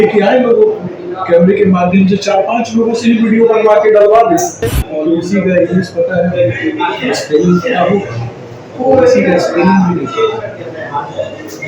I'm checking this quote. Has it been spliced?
yes; 1 cut; at 5.2 s

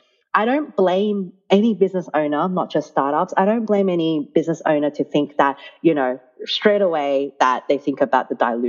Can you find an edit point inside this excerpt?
no; 0 cuts

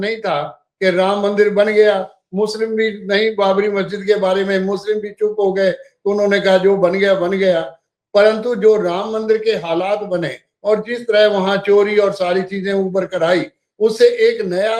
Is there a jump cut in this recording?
no; 0 cuts

